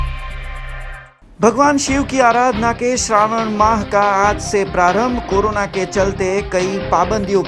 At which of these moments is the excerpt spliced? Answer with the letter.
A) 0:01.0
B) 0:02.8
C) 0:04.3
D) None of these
A